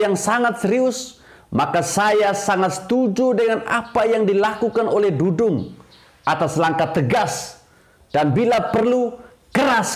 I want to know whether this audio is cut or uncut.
uncut